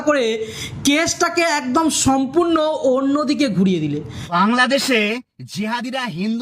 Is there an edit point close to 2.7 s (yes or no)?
no